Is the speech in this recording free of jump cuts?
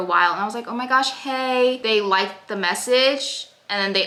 yes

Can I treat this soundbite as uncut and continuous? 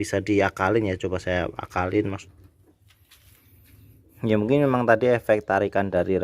no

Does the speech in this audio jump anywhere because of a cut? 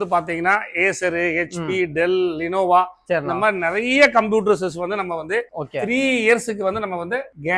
no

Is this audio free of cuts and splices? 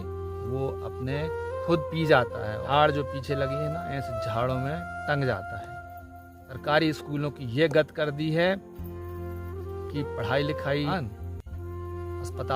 no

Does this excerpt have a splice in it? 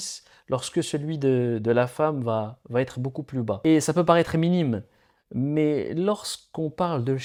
no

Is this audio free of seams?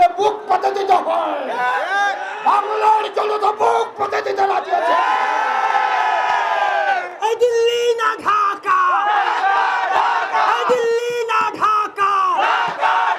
yes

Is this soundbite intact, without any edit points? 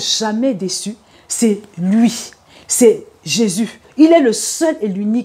no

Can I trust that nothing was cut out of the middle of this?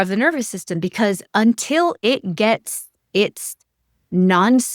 yes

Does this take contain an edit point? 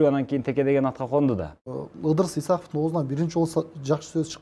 yes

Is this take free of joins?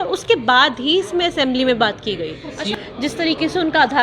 no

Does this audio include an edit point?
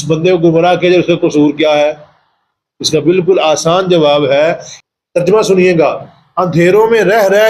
yes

